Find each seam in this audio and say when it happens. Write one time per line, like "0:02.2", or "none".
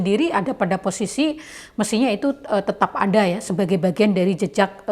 none

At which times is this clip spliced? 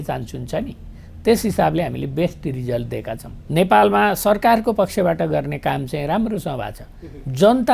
0:03.3

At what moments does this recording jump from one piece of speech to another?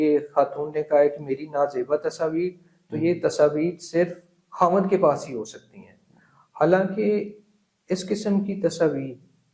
none

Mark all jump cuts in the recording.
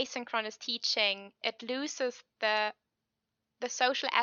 none

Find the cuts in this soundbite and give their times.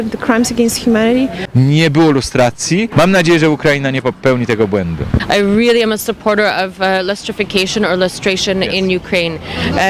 0:01.4
0:05.1

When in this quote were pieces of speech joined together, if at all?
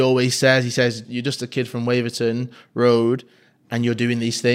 0:01.0

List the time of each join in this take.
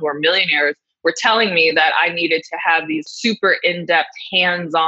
0:03.0

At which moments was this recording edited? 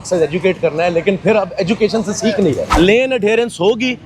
0:02.6

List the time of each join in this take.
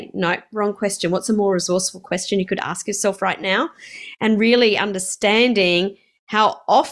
none

